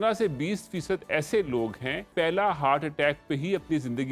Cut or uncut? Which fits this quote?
cut